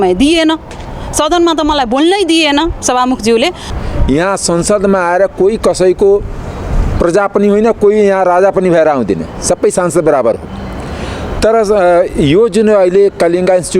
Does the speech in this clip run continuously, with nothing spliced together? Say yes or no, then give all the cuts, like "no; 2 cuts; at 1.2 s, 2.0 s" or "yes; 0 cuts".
no; 1 cut; at 3.7 s